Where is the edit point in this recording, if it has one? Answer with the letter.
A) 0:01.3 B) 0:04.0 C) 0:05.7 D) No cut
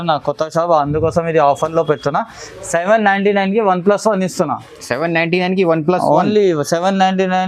D